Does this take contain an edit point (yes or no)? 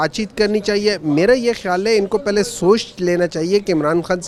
no